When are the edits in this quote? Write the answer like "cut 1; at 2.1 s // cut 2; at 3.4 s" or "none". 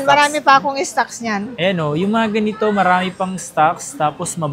none